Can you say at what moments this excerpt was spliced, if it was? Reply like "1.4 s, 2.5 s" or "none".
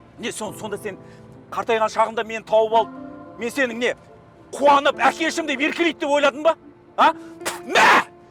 none